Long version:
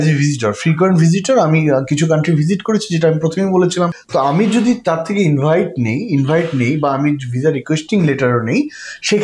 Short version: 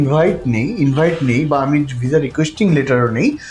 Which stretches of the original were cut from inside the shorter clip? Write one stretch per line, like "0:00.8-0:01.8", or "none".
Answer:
none